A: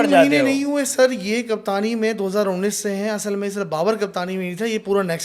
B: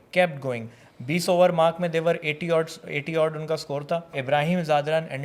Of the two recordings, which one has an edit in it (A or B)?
B